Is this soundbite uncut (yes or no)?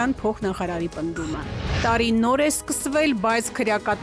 no